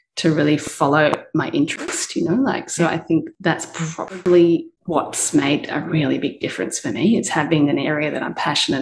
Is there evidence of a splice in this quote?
no; 0 cuts

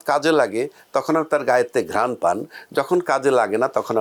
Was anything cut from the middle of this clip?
no; 0 cuts

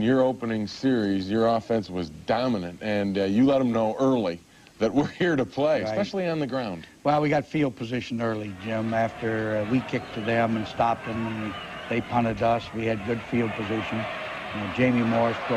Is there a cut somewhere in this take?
yes; 1 cut; at 5.4 s

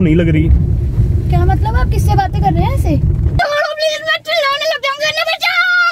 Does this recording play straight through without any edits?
no; 1 cut; at 3.2 s

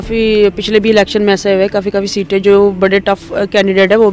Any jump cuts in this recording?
no; 0 cuts

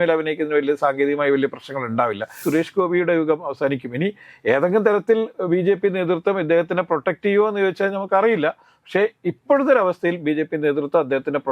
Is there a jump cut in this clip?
yes; 1 cut; at 2.4 s

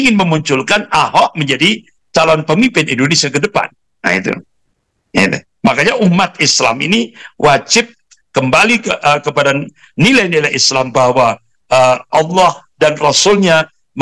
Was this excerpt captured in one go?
yes; 0 cuts

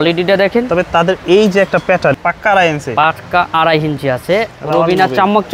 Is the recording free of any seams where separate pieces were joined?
no; 2 cuts; at 2.2 s, 4.5 s

